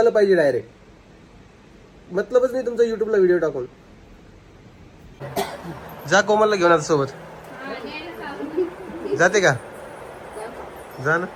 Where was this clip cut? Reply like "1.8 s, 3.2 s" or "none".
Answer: 5.2 s